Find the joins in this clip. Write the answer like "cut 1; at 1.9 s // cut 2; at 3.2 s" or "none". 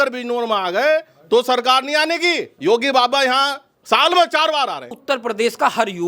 cut 1; at 2.5 s // cut 2; at 5.0 s